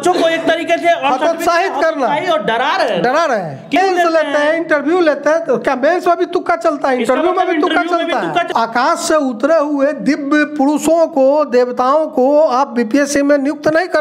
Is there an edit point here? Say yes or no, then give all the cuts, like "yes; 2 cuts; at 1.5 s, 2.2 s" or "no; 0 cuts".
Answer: yes; 2 cuts; at 3.8 s, 8.5 s